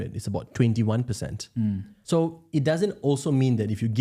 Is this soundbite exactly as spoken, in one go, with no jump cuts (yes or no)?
no